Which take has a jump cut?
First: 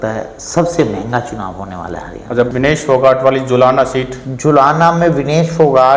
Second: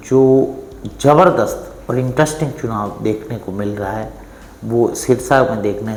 first; 1 cut; at 2.5 s

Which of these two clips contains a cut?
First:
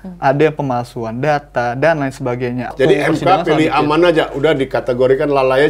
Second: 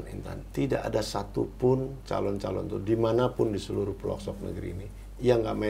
first; 1 cut; at 2.7 s

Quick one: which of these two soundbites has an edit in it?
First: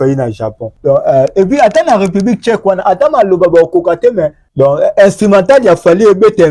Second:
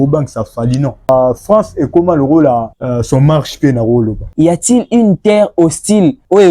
second; 2 cuts; at 1.1 s, 4.2 s

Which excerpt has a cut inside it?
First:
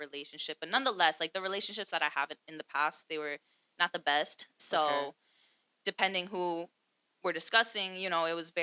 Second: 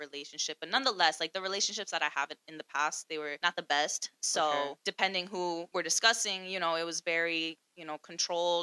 second; 3 cuts; at 3.4 s, 4.8 s, 5.7 s

